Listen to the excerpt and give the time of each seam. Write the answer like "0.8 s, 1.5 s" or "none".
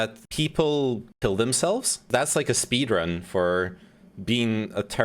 2.0 s